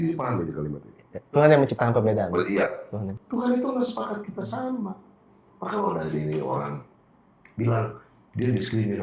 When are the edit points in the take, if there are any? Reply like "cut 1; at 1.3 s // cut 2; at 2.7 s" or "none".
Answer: cut 1; at 3.2 s